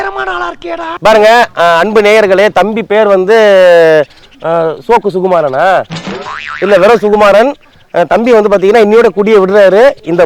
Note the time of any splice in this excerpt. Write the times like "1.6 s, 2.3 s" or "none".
0.9 s